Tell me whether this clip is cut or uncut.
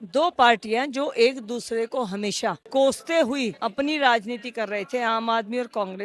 uncut